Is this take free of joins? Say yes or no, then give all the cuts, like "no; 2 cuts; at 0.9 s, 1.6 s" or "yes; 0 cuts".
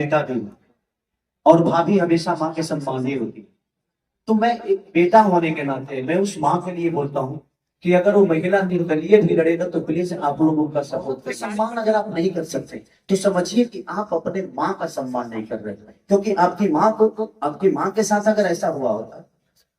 no; 1 cut; at 11.3 s